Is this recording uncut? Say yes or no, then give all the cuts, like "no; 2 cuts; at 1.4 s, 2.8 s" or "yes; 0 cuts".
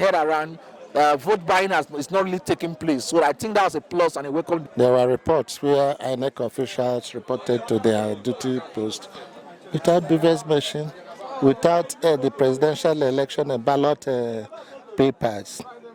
no; 1 cut; at 4.6 s